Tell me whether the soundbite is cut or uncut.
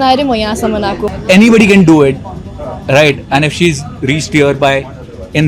cut